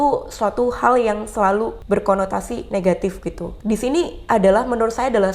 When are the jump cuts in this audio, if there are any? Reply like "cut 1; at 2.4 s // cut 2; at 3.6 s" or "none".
cut 1; at 1.8 s // cut 2; at 3.5 s